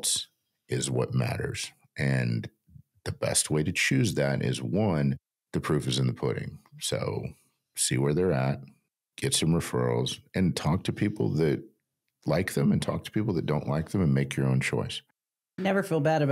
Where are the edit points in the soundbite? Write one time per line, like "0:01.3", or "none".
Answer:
none